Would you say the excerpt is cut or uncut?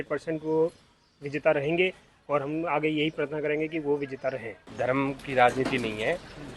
cut